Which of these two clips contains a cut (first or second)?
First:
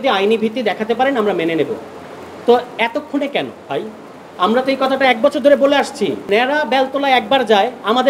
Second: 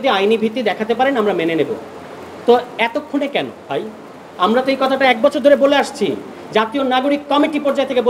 first